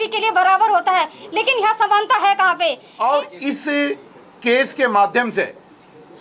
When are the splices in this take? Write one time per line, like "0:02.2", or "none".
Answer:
0:02.9

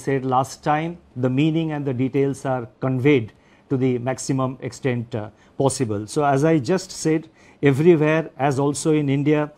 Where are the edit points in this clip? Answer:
0:01.0

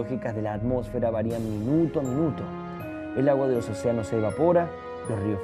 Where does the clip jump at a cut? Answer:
0:03.0

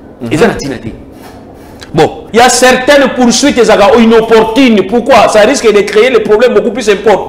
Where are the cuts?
0:02.2

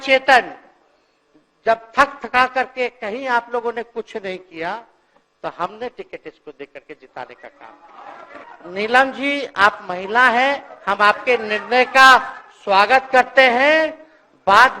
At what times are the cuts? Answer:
0:08.5

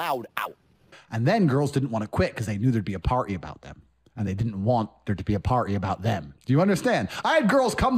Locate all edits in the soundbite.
0:00.9

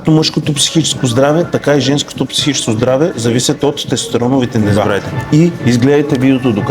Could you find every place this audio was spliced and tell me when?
0:05.3

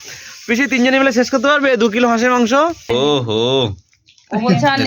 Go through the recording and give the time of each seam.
0:02.8

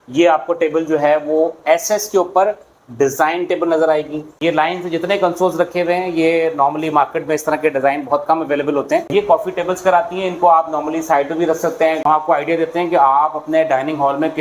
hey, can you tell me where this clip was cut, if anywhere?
0:04.4
0:09.1
0:12.1

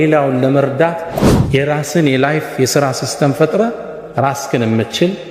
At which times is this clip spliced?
0:01.1

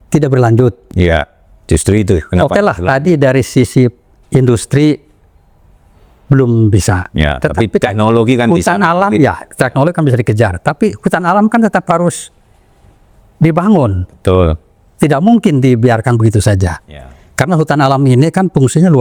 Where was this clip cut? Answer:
none

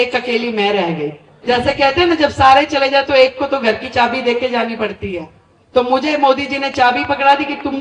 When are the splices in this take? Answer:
0:01.3

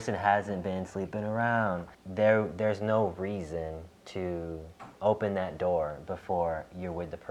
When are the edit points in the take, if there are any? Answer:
0:02.0
0:03.9
0:04.8

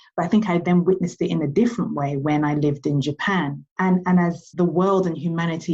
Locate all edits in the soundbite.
0:03.6
0:04.4

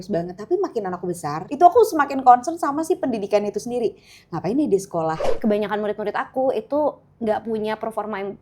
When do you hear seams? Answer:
0:01.4
0:05.2

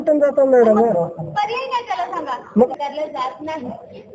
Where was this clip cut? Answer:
0:02.7

